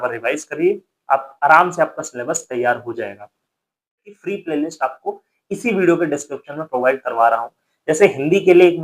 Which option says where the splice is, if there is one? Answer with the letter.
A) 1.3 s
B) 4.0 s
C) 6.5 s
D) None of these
B